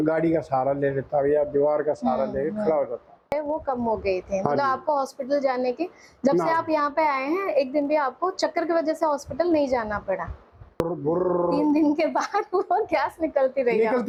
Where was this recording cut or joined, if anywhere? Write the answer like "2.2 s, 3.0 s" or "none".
none

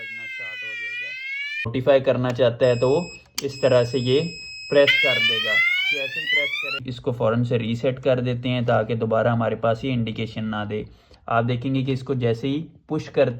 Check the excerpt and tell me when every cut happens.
1.7 s, 6.8 s

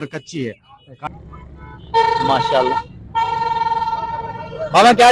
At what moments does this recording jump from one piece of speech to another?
1.1 s

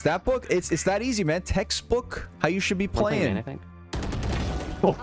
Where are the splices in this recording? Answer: 3.7 s

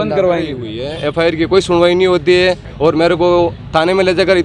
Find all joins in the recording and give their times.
0.9 s, 2.7 s

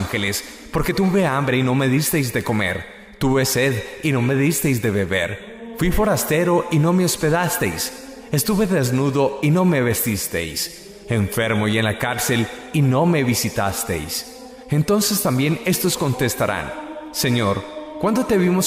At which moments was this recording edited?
none

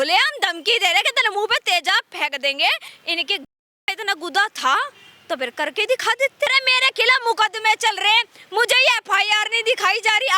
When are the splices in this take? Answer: 2.9 s, 6.5 s

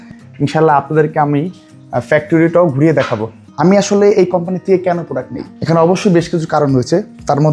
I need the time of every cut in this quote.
3.4 s

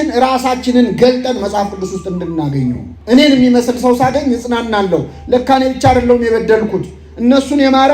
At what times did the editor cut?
2.9 s

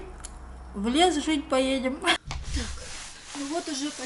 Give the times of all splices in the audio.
2.2 s

